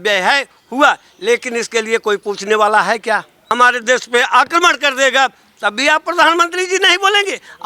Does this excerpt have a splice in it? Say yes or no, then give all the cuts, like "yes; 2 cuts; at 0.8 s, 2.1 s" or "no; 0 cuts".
yes; 1 cut; at 3.3 s